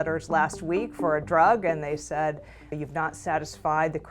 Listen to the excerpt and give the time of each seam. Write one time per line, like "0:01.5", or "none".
0:02.7